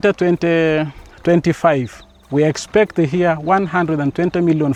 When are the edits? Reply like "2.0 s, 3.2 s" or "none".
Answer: none